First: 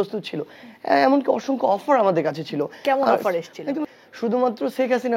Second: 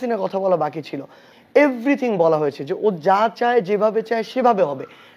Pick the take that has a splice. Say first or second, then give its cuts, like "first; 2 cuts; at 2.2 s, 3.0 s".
first; 1 cut; at 3.9 s